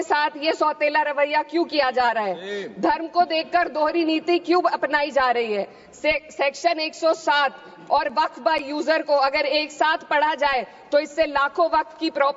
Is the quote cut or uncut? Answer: uncut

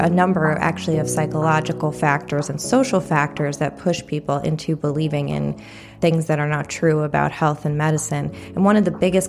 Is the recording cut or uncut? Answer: cut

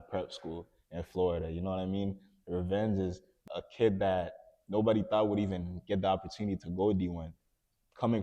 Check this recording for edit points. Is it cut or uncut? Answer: cut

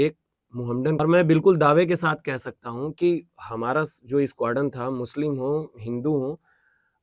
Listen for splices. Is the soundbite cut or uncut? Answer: cut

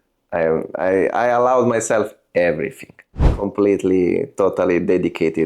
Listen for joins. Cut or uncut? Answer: cut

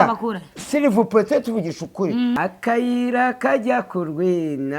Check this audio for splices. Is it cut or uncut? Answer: cut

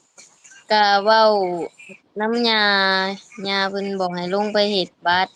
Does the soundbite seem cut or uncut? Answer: uncut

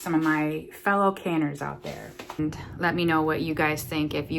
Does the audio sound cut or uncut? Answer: cut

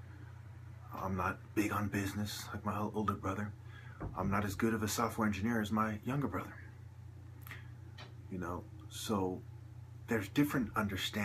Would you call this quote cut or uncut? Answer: cut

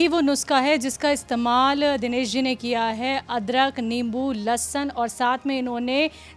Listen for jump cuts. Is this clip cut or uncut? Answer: uncut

